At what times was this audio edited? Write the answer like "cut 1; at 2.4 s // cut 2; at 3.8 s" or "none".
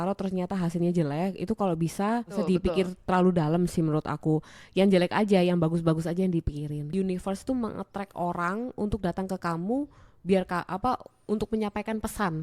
cut 1; at 2.4 s // cut 2; at 6.9 s